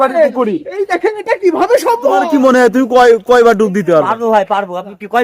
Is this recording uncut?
no; 1 cut; at 2.2 s

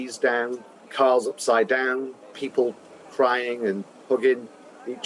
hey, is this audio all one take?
no; 2 cuts; at 0.9 s, 2.4 s

